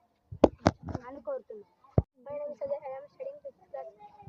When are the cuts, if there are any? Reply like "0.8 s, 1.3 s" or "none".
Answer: 2.2 s